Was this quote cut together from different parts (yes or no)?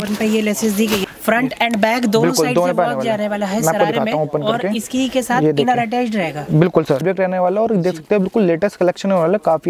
yes